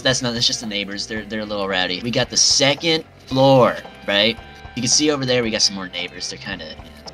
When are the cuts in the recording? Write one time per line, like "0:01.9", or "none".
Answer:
0:02.0
0:04.8

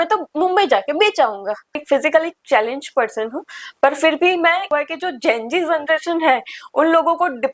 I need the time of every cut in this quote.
0:01.8
0:04.7

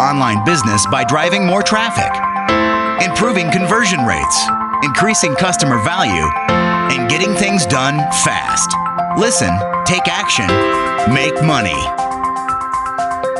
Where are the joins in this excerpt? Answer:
none

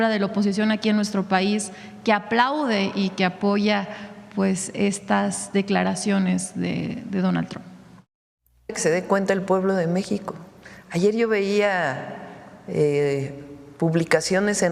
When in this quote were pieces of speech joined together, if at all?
0:08.3

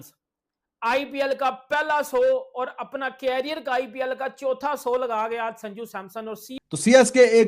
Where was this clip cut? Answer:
none

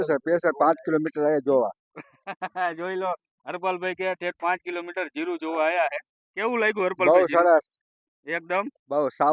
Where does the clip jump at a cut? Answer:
none

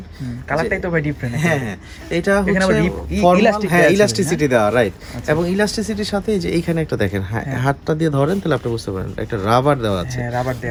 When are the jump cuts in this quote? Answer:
none

